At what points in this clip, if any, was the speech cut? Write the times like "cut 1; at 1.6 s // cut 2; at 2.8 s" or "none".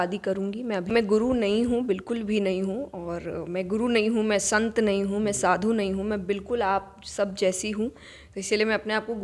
cut 1; at 0.9 s